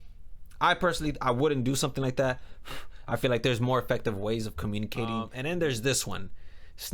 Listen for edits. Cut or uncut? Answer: cut